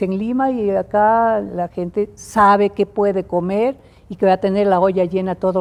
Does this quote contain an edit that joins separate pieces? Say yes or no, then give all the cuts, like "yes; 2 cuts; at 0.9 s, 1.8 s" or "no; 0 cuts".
no; 0 cuts